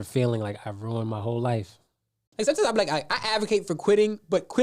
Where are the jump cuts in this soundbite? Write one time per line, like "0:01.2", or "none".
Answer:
0:02.2